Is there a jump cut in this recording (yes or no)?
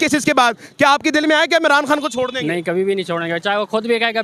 no